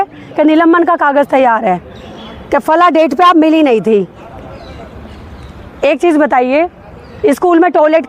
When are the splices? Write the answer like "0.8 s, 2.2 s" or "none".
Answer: none